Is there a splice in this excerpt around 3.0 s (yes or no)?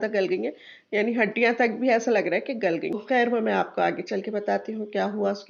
yes